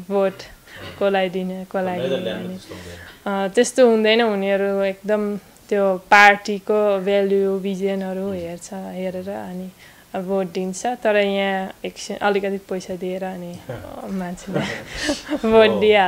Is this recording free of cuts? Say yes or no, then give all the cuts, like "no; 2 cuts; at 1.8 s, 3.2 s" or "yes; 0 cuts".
yes; 0 cuts